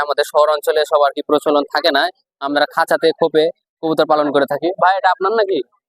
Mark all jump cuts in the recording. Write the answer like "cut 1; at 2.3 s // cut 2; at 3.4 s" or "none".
none